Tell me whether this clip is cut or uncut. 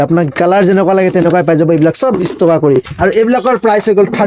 uncut